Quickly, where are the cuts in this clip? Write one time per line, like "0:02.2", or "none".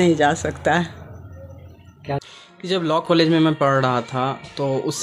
none